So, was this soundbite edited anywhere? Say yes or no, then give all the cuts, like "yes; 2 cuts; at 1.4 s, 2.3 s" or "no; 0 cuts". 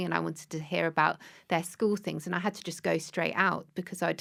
no; 0 cuts